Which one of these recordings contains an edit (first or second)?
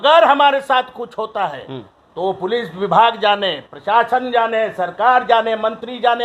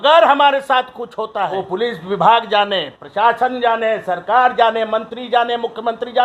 second